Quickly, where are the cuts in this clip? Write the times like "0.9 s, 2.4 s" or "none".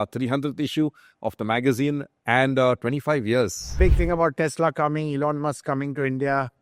3.8 s